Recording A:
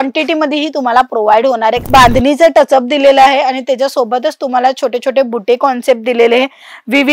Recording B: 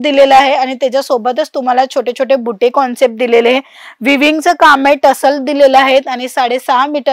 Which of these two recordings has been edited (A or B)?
A